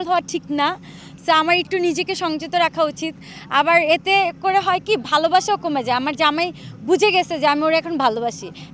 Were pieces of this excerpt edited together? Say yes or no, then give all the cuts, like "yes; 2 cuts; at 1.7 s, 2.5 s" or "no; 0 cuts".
no; 0 cuts